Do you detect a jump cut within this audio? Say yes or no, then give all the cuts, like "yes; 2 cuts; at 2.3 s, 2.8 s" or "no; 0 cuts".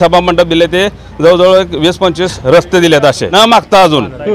yes; 2 cuts; at 2.4 s, 3.3 s